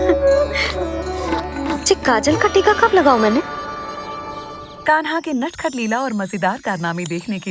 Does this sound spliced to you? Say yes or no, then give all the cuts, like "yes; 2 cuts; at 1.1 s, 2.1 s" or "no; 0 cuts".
yes; 1 cut; at 4.6 s